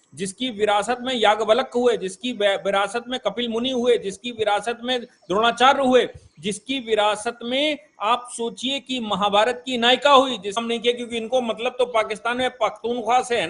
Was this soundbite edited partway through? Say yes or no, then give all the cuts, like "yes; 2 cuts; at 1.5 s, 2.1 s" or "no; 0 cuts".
yes; 1 cut; at 10.6 s